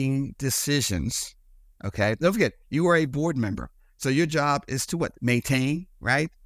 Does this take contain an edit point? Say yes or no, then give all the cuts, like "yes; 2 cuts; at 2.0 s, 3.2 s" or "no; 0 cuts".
no; 0 cuts